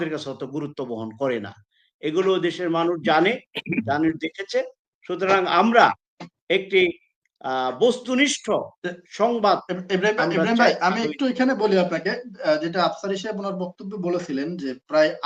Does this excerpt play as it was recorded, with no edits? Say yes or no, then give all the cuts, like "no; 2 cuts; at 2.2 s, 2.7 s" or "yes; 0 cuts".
yes; 0 cuts